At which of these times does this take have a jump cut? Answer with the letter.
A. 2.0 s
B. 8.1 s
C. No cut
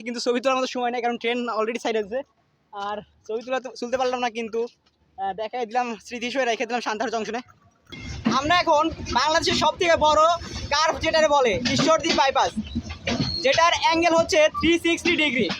B